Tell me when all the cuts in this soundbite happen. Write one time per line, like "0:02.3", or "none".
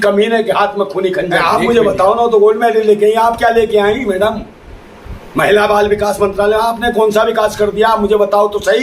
0:01.4